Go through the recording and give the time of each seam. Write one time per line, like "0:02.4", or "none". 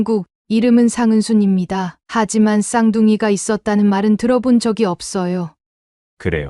0:05.6